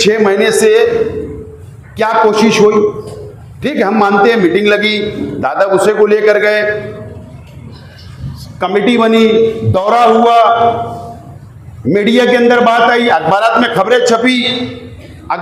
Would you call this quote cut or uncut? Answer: uncut